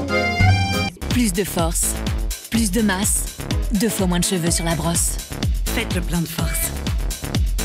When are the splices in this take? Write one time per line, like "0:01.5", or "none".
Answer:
0:00.9